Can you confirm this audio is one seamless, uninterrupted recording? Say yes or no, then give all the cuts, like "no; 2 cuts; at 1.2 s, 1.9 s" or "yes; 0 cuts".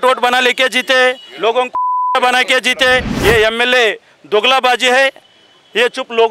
no; 1 cut; at 3.1 s